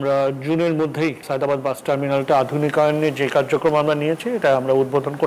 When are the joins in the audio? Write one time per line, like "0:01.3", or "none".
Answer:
0:01.2

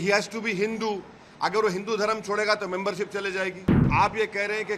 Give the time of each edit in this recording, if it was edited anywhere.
0:03.8

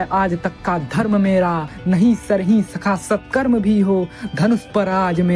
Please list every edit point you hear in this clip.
0:01.7

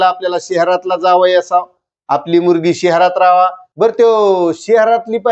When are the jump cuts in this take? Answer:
0:03.6

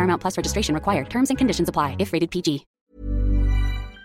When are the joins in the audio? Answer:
0:02.8

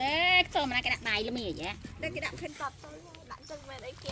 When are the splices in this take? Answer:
0:02.5

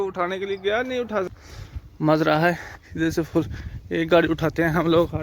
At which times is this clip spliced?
0:01.3

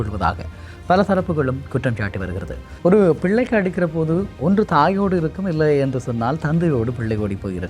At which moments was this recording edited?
0:02.6

